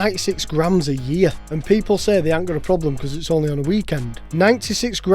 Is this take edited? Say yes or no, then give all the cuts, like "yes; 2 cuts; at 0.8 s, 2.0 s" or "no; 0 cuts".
yes; 2 cuts; at 1.5 s, 4.2 s